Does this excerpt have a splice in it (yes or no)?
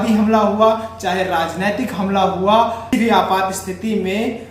yes